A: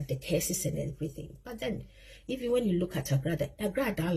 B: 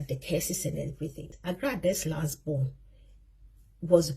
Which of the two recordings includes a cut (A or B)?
B